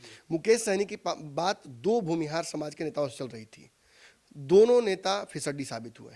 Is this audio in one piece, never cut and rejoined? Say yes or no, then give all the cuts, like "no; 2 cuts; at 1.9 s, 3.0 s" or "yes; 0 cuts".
yes; 0 cuts